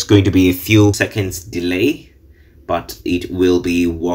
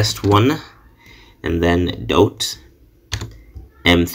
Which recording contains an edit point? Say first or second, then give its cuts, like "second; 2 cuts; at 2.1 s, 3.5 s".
first; 1 cut; at 1.0 s